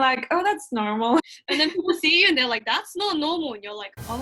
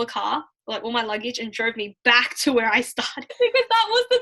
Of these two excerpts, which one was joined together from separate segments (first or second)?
second